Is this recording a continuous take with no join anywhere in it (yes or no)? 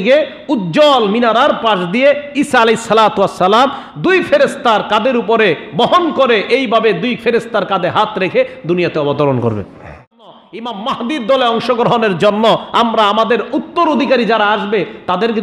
no